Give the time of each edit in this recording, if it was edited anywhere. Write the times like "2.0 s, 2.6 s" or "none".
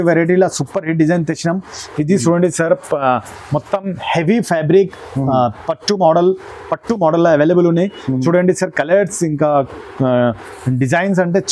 none